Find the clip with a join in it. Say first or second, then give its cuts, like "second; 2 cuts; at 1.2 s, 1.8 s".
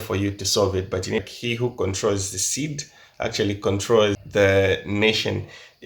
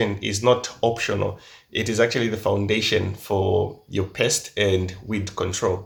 first; 2 cuts; at 1.3 s, 4.2 s